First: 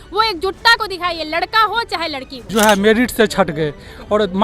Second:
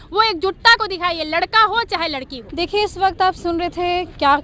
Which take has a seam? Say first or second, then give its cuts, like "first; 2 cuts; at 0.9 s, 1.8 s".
first; 1 cut; at 2.3 s